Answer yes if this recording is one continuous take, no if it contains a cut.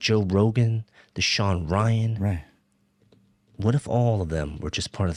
yes